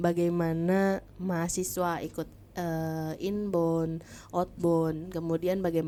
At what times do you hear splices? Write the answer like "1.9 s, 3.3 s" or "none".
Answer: none